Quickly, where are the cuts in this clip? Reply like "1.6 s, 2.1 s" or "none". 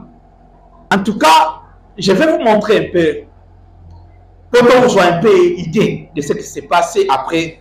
0.9 s